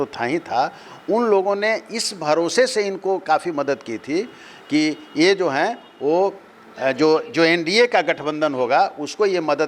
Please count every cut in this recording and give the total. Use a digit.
0